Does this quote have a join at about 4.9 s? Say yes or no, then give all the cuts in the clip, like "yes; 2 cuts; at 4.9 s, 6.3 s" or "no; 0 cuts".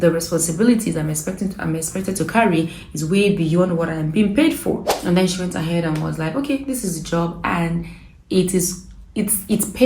yes; 1 cut; at 4.9 s